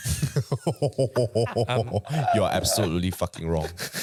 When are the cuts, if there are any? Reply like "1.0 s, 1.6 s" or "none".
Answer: none